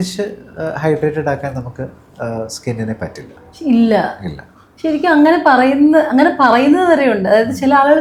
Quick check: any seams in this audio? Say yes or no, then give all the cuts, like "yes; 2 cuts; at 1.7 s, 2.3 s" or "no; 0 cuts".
no; 0 cuts